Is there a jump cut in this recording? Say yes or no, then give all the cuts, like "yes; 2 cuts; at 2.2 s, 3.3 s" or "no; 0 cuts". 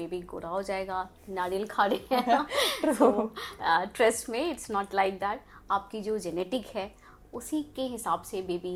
no; 0 cuts